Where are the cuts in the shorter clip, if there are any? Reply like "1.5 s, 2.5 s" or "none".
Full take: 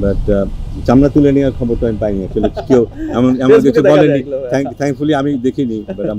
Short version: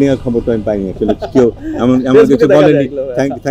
none